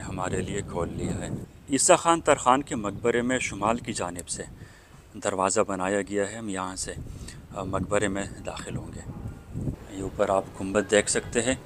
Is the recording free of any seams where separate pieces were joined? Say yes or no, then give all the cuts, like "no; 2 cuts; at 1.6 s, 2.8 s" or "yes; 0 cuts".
no; 2 cuts; at 1.6 s, 9.7 s